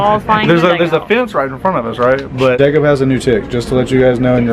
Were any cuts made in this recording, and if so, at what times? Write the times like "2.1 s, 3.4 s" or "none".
2.6 s